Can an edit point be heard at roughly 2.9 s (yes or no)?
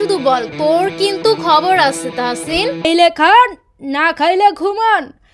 yes